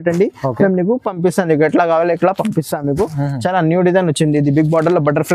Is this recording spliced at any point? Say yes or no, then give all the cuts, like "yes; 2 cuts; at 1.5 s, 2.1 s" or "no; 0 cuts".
no; 0 cuts